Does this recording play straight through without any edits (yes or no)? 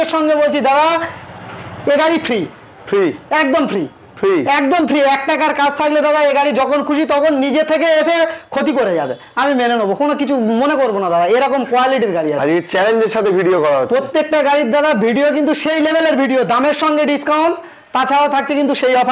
yes